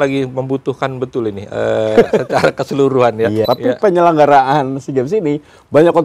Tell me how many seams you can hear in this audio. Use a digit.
1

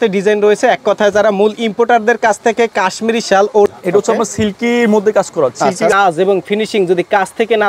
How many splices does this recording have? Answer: 2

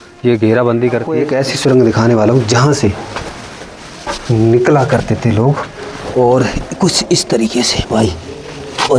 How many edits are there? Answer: 1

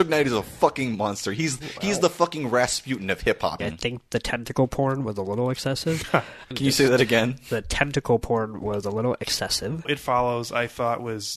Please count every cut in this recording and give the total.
3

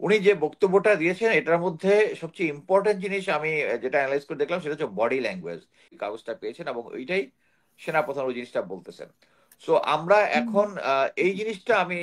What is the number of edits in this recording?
1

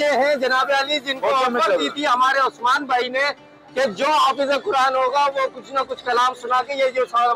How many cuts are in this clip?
0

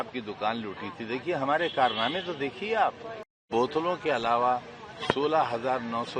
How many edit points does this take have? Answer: 1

